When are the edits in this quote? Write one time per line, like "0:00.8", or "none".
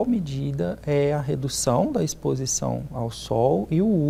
none